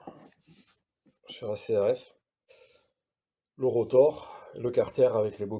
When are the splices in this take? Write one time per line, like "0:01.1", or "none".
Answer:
0:02.5